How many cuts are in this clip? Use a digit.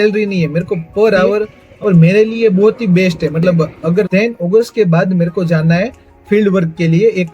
2